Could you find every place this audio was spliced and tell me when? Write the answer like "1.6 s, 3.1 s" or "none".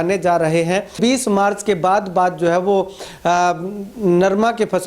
1.0 s